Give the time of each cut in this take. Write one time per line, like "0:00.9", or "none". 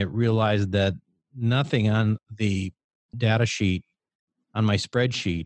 none